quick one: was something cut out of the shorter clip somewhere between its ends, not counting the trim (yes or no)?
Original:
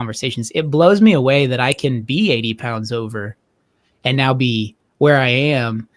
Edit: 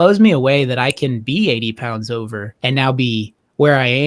yes